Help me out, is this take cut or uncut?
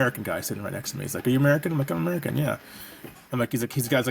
uncut